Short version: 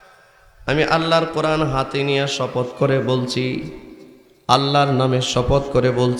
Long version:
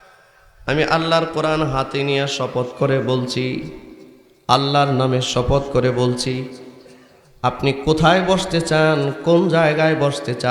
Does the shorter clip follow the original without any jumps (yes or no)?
yes